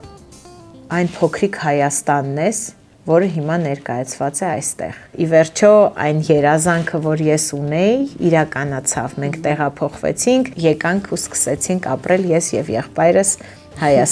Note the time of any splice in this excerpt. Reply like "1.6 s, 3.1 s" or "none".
5.1 s, 10.5 s